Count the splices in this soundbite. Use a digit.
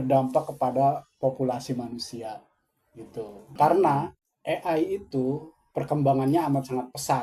1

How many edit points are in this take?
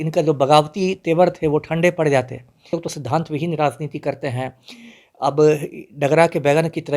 1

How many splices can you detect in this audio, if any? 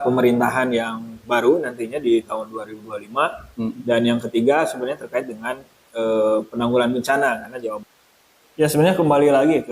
1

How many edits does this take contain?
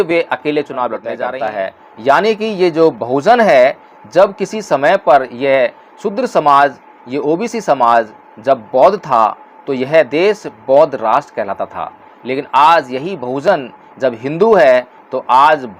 1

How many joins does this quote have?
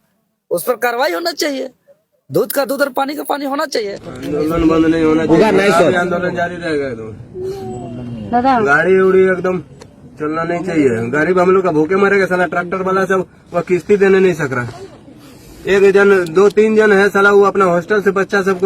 1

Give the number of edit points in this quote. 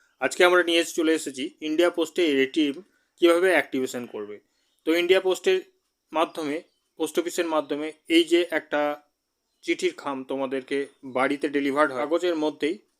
1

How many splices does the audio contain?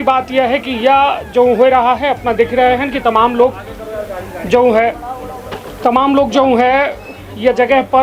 0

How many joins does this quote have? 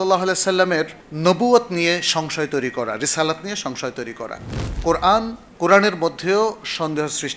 3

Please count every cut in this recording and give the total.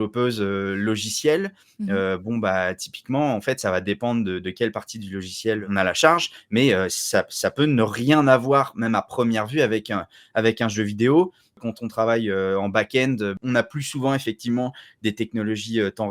3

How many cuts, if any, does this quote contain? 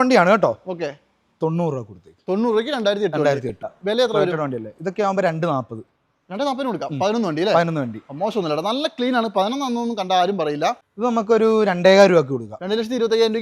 2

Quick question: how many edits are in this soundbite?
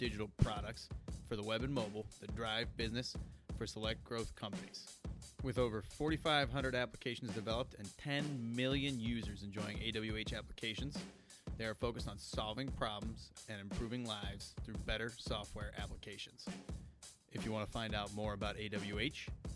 0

